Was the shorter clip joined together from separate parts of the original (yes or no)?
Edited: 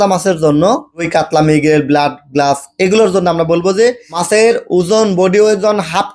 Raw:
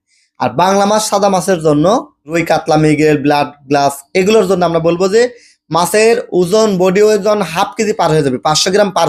yes